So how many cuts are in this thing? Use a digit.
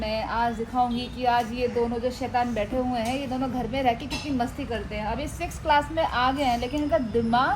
1